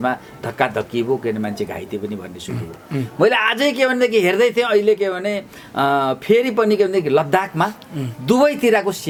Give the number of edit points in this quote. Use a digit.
0